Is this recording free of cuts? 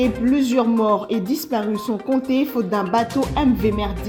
yes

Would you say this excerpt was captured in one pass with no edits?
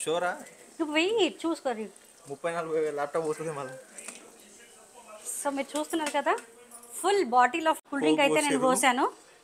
no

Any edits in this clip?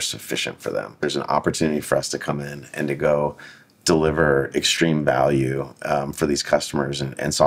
yes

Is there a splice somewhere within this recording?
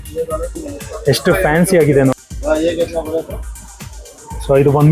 yes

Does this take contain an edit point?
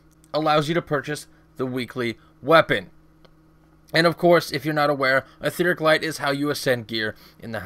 yes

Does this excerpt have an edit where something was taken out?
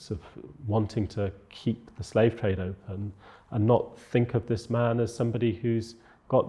no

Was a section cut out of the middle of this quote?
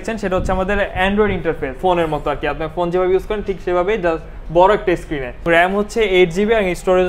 yes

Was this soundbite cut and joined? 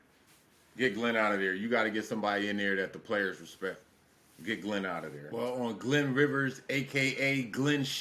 yes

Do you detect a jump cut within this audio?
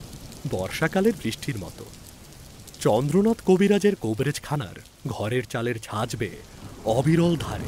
no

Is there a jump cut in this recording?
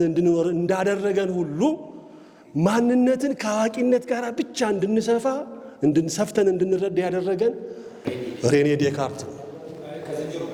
no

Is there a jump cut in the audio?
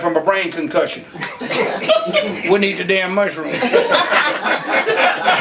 no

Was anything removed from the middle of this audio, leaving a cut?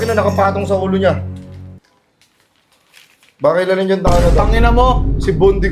no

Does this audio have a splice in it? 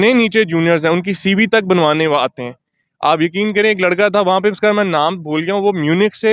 no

